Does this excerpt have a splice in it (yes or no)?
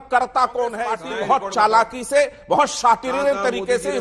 yes